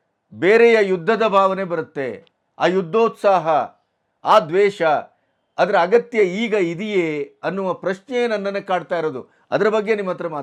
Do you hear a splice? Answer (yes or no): no